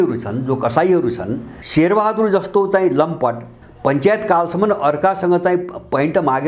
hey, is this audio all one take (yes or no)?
no